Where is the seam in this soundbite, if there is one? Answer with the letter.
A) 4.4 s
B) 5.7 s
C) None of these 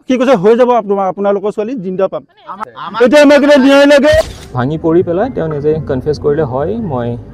A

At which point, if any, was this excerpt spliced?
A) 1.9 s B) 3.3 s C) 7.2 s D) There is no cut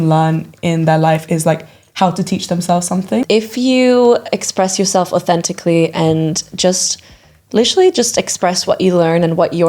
B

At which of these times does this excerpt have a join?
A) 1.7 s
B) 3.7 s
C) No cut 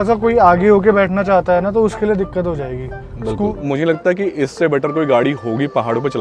B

